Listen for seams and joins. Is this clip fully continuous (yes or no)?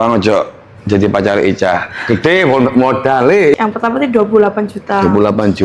no